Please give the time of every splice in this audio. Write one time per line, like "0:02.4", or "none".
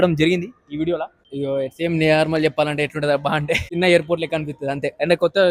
none